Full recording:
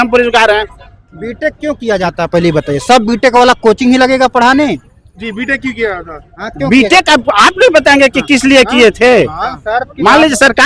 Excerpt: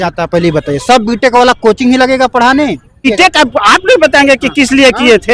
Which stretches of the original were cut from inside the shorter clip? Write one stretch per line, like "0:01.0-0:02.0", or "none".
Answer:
0:05.1-0:06.8